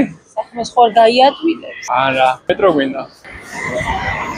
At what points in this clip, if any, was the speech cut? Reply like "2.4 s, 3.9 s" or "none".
2.4 s